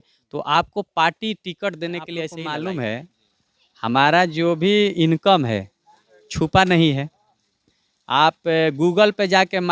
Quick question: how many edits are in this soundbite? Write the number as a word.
one